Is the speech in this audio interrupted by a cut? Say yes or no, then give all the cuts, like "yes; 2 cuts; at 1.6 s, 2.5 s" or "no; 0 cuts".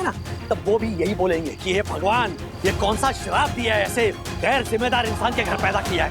yes; 1 cut; at 2.4 s